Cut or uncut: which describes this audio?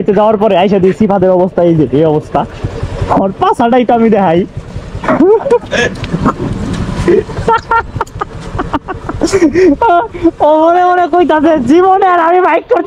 uncut